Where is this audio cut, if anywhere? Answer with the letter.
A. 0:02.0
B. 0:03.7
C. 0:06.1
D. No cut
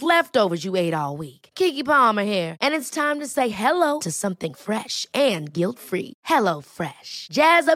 D